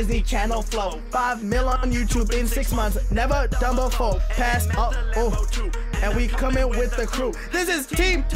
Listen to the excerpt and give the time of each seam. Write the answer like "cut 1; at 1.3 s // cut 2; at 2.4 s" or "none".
none